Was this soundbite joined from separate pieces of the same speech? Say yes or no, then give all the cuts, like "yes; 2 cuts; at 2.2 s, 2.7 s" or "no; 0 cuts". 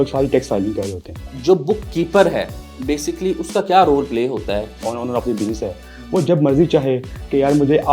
yes; 2 cuts; at 1.3 s, 4.8 s